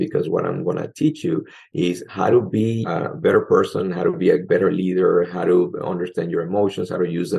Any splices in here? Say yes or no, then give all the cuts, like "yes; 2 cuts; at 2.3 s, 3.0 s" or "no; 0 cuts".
yes; 3 cuts; at 2.8 s, 4.4 s, 5.7 s